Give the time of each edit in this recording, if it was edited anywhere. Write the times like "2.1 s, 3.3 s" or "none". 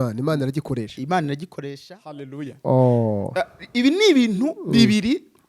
1.7 s